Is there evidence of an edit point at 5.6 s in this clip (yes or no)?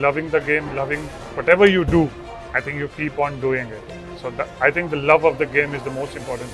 no